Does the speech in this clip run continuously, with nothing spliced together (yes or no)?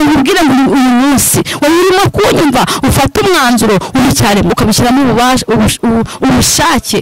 no